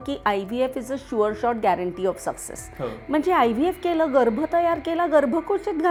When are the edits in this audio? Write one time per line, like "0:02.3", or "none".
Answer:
none